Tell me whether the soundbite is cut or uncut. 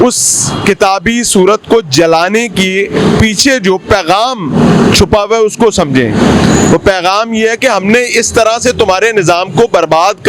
uncut